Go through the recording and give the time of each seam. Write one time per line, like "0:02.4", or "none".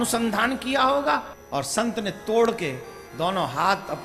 0:01.4

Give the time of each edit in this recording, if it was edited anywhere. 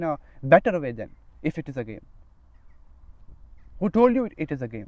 none

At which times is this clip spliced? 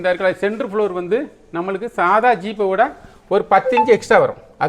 none

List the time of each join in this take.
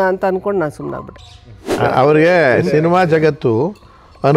0:01.8

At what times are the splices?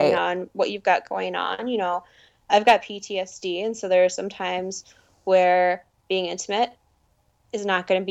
none

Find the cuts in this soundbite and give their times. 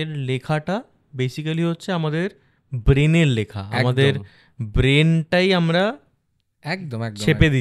none

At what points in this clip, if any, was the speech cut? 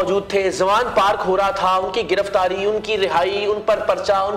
none

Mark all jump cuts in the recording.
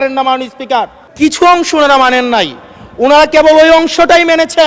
0:01.0

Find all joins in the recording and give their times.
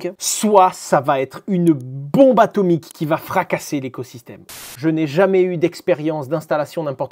0:04.7

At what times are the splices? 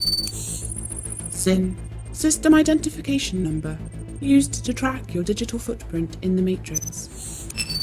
0:01.2

